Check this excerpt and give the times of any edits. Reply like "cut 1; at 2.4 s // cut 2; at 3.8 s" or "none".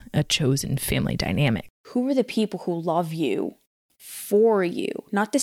cut 1; at 1.8 s